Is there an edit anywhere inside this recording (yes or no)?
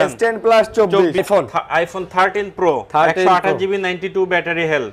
yes